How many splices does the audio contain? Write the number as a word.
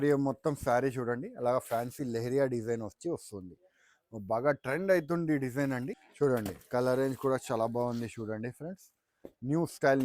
one